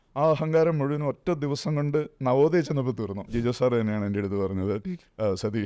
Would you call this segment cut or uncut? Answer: cut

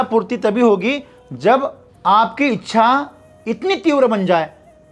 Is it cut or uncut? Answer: cut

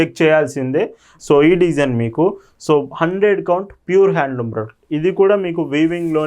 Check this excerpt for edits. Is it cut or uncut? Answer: cut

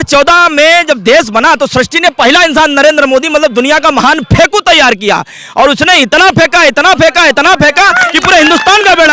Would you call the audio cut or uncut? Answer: uncut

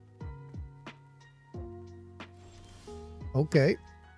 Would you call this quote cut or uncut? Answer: uncut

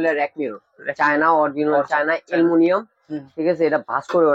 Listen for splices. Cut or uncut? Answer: uncut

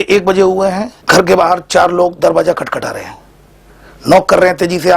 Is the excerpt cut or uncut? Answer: cut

